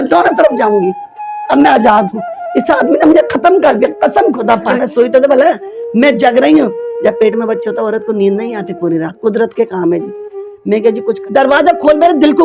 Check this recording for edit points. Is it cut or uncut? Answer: cut